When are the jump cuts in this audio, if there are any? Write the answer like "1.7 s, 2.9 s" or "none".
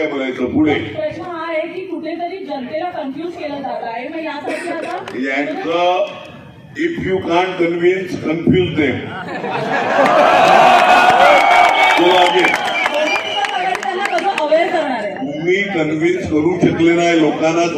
none